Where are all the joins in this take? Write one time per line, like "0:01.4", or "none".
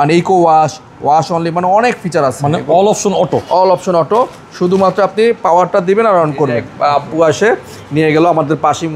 0:06.6